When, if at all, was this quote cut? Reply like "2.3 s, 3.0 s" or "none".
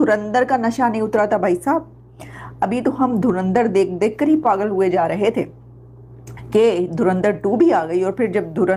none